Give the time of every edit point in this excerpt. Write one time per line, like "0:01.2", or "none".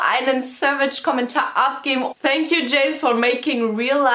0:02.1